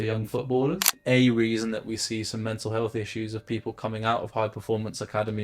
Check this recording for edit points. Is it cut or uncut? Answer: cut